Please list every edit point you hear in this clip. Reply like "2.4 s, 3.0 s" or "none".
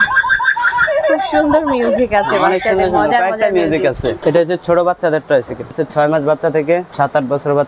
4.2 s, 5.8 s, 6.9 s

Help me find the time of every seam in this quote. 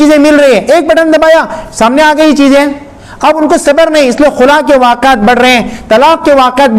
none

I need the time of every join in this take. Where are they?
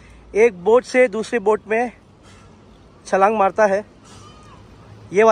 none

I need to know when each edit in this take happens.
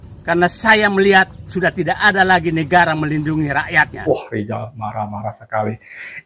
4.1 s

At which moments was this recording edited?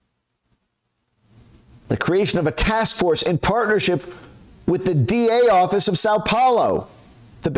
1.7 s

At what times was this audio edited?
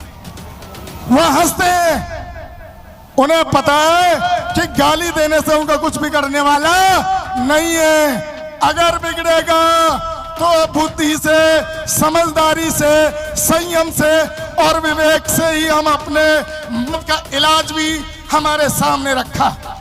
16.9 s

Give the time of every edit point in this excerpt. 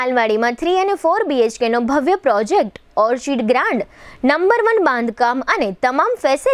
none

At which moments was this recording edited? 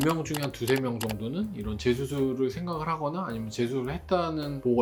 none

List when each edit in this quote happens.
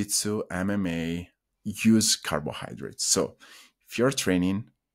1.4 s

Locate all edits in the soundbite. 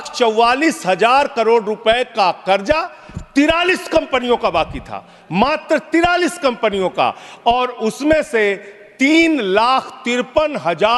none

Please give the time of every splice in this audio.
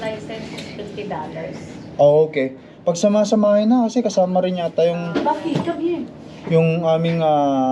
none

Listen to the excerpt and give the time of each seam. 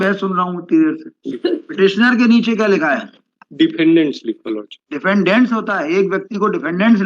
1.3 s

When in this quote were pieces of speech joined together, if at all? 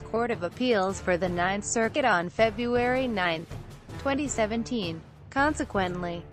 1.6 s

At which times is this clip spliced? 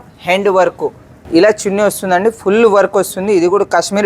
1.1 s

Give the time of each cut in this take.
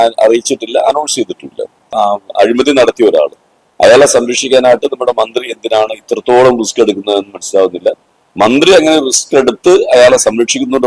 1.9 s

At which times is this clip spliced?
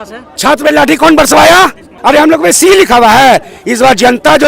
1.9 s

